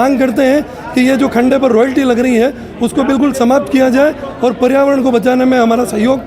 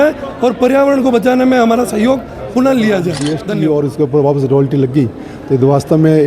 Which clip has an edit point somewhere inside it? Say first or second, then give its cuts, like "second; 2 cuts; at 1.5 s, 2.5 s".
second; 1 cut; at 3.3 s